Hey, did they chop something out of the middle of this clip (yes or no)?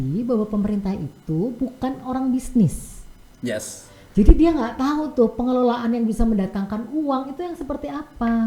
no